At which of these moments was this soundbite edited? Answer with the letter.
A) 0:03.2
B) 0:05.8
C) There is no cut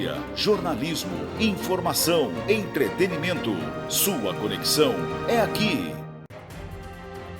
B